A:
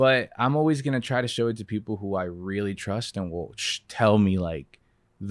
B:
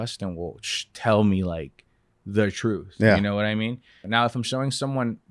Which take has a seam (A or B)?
B